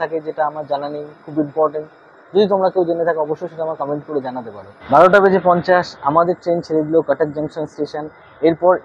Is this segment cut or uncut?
uncut